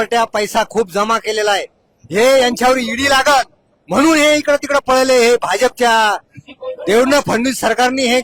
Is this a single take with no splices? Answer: yes; 0 cuts

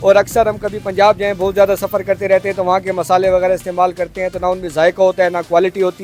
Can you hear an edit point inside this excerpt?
no; 0 cuts

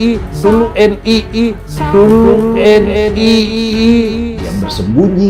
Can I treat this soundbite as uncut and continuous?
no; 1 cut; at 4.3 s

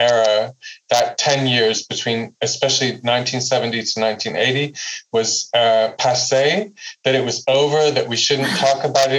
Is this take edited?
no; 0 cuts

